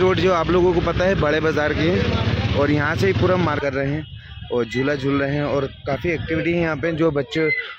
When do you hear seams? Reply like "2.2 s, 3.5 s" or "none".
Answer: 3.6 s